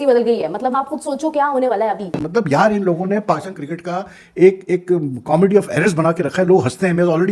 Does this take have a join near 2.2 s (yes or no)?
yes